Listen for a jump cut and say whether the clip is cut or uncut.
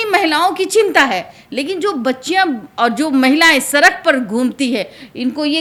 uncut